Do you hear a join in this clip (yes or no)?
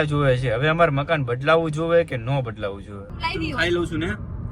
yes